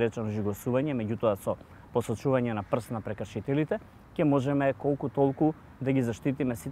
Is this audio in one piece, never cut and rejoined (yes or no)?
yes